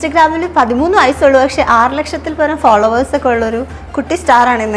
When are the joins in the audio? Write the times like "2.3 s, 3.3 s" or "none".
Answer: none